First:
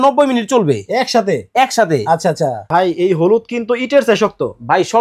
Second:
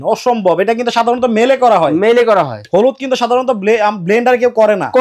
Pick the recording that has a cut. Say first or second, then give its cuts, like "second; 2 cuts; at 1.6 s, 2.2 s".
first; 1 cut; at 2.6 s